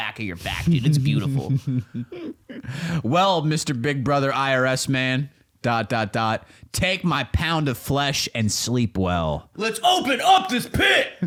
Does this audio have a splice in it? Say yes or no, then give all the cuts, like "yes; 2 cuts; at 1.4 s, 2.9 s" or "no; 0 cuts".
no; 0 cuts